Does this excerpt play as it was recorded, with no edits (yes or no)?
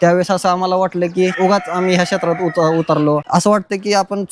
no